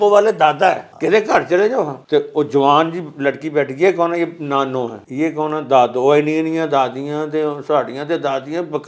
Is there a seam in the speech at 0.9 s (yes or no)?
yes